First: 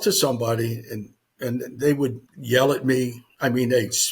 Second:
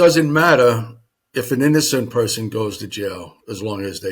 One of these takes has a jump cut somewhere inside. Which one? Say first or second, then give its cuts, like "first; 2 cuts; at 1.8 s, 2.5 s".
first; 1 cut; at 2.3 s